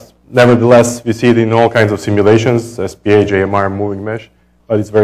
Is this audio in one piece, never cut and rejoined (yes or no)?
no